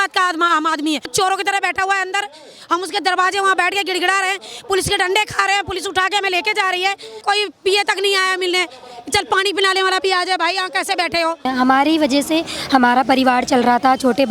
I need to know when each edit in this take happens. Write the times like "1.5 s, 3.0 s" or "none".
1.1 s, 7.2 s, 11.5 s

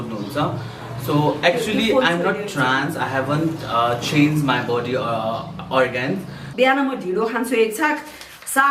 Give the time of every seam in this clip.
6.5 s

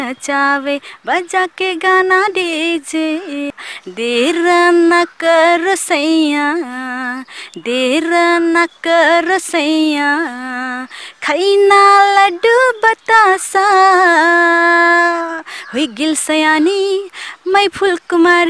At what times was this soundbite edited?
3.5 s

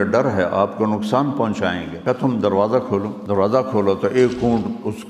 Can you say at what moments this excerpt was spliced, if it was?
1.9 s, 3.2 s

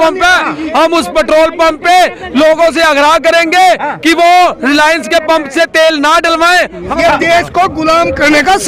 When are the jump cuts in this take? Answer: 6.8 s

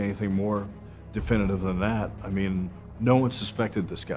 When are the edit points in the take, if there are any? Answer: 2.8 s

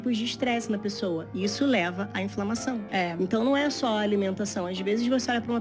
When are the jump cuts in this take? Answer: none

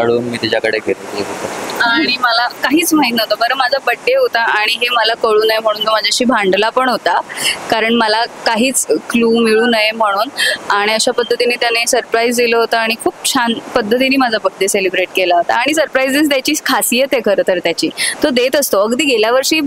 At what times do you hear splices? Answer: none

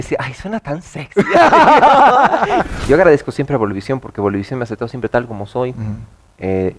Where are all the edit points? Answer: 2.6 s

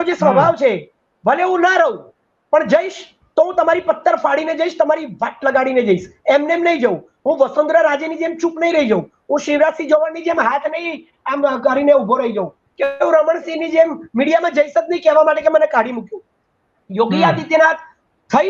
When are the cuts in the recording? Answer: none

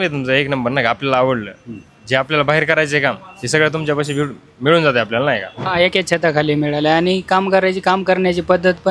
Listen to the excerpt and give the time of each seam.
5.6 s

